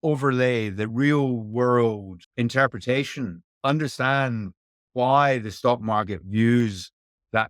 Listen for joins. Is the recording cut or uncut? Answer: cut